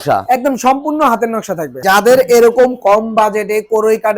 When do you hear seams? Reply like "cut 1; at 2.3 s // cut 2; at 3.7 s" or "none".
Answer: cut 1; at 1.8 s